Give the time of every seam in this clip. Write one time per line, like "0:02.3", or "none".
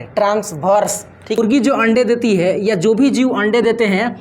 0:01.4